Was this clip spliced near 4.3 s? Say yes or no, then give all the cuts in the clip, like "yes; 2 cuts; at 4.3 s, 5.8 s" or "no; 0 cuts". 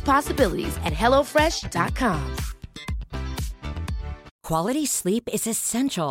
yes; 1 cut; at 4.3 s